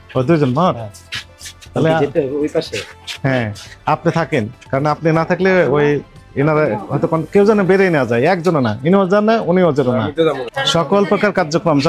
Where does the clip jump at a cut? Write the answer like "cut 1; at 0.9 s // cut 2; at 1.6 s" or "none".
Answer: cut 1; at 10.5 s